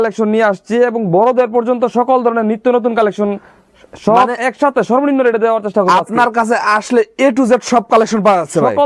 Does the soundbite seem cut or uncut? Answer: uncut